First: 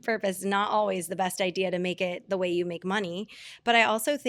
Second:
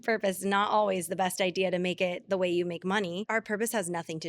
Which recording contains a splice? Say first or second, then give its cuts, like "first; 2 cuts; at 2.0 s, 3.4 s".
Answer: second; 1 cut; at 3.3 s